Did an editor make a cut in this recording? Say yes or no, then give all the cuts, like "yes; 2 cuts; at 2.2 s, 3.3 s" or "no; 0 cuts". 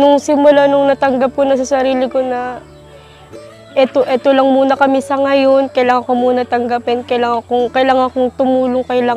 no; 0 cuts